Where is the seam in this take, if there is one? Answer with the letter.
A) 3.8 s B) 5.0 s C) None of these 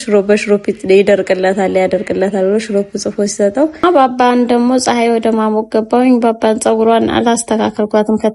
A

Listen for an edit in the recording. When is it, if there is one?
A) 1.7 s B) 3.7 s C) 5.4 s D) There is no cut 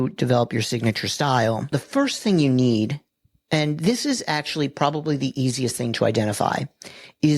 A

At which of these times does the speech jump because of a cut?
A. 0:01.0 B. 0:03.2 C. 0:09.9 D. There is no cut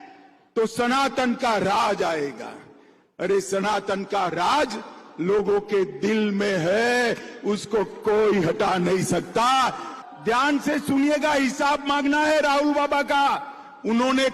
C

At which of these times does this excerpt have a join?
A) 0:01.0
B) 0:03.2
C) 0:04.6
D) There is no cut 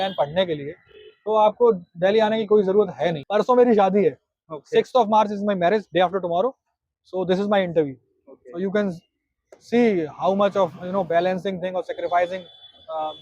B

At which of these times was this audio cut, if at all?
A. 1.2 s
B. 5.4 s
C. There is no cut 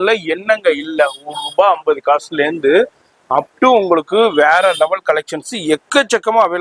C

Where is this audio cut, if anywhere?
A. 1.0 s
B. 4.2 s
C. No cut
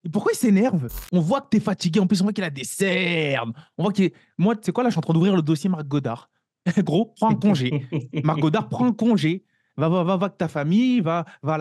A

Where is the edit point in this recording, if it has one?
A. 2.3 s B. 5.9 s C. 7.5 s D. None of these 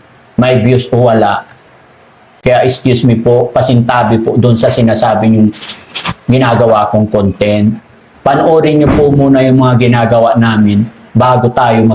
A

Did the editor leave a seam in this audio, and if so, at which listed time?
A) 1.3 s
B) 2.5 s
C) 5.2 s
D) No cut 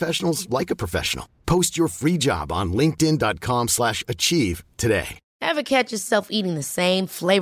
C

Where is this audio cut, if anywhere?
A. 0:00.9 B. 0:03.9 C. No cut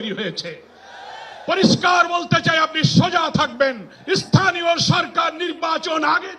B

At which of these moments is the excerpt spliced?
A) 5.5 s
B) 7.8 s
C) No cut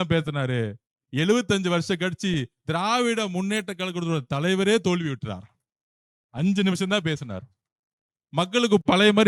C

